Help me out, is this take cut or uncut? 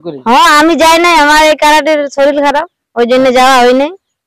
uncut